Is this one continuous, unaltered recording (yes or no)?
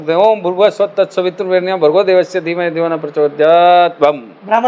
yes